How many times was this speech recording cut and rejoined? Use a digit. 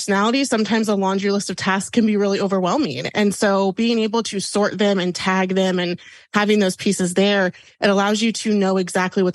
0